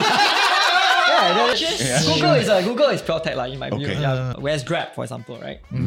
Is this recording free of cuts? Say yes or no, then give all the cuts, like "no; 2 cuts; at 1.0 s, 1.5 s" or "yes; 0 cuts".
no; 2 cuts; at 1.6 s, 4.3 s